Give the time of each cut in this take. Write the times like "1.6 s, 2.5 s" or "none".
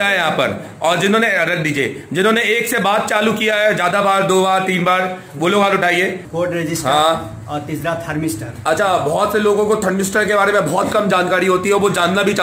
6.2 s